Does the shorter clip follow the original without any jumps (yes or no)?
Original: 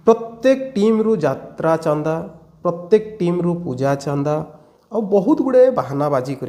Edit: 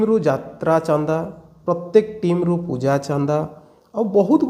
yes